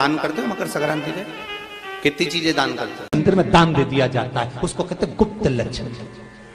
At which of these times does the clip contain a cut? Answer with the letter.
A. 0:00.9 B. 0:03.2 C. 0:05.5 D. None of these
B